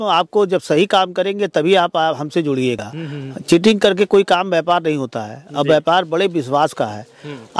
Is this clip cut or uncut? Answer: uncut